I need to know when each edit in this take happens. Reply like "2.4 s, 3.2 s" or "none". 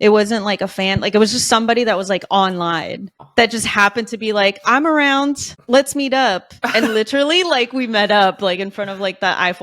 none